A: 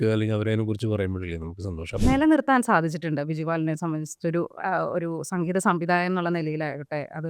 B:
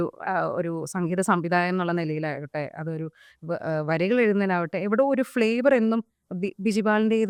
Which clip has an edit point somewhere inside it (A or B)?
A